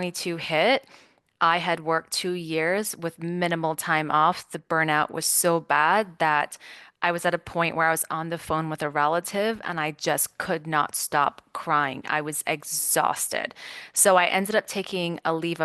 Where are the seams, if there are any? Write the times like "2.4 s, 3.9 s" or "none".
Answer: none